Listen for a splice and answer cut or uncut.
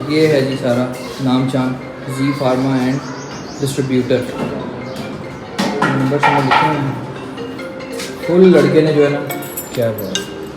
uncut